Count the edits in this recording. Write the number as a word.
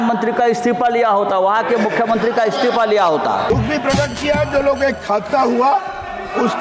one